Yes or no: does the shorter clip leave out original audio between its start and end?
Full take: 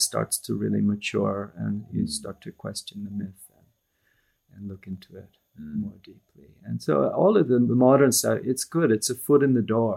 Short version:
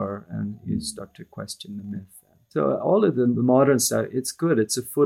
yes